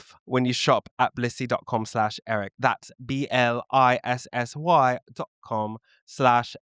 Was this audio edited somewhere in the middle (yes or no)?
yes